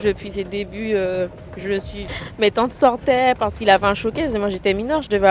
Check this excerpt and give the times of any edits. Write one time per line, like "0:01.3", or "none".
0:02.0